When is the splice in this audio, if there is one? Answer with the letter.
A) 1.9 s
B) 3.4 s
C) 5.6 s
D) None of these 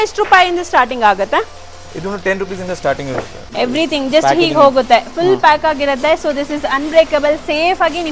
B